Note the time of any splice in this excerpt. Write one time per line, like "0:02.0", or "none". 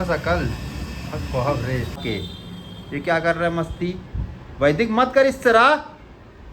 0:02.0